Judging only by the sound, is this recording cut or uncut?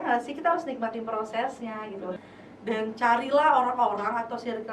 cut